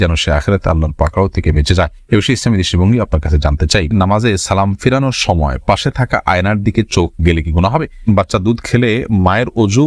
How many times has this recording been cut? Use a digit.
2